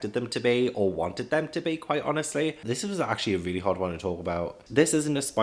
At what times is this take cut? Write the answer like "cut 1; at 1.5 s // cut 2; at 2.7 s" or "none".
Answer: cut 1; at 2.6 s // cut 2; at 4.6 s

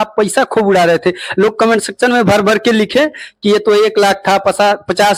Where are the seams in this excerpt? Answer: none

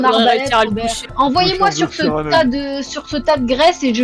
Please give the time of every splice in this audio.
cut 1; at 1.1 s

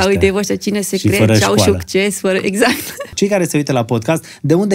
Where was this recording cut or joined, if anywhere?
cut 1; at 3.1 s

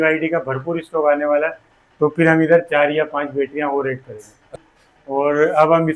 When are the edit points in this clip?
cut 1; at 4.5 s

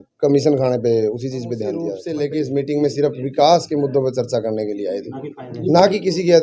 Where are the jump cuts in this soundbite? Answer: cut 1; at 2.0 s

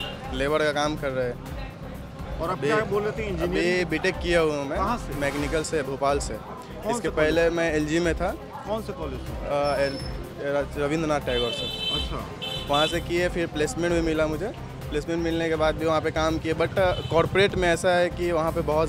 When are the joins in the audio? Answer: none

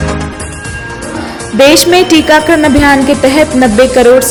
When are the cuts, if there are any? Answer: none

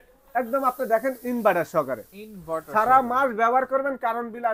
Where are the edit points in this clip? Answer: none

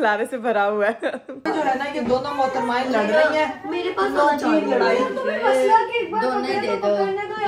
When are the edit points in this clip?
cut 1; at 1.3 s

